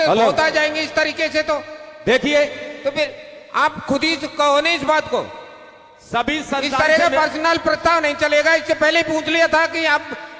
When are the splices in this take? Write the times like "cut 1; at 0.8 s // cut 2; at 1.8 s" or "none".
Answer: none